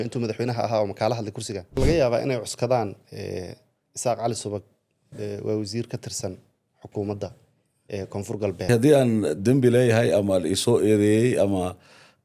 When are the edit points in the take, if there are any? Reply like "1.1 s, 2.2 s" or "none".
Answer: 1.7 s, 8.7 s